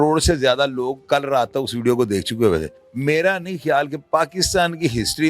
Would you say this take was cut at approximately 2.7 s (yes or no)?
yes